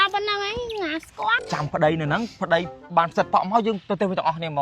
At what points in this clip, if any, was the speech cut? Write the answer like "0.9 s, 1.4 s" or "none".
1.4 s

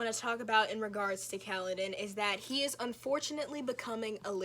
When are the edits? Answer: none

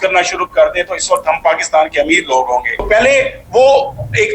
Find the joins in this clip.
2.7 s

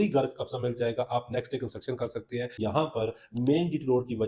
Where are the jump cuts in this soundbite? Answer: 2.6 s

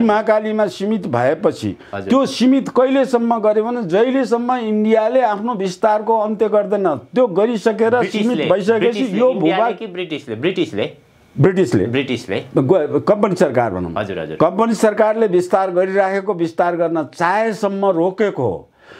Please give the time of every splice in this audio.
none

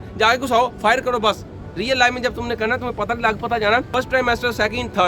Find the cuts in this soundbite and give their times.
3.9 s

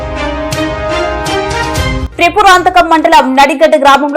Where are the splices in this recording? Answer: 2.0 s

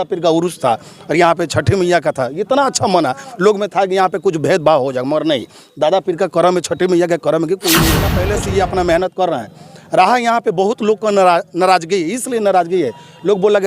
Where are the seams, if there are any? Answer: 8.2 s

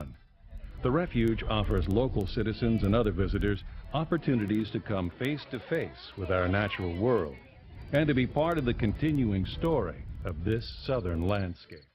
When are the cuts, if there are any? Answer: none

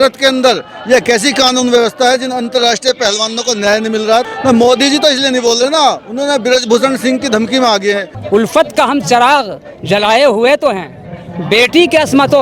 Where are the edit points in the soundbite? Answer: 4.3 s, 8.1 s

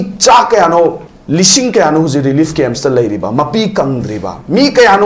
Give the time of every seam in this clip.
1.1 s

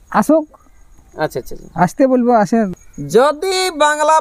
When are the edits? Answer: 2.7 s

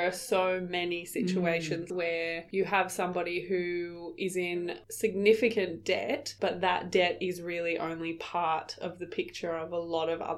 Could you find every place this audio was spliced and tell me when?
1.9 s, 6.3 s

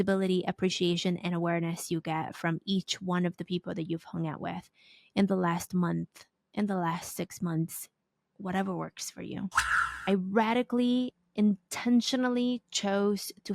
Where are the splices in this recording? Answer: 9.7 s

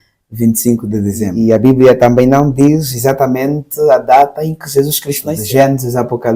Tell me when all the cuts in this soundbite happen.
1.3 s, 5.3 s

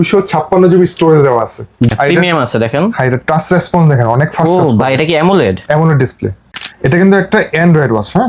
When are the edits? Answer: 1.9 s, 6.4 s

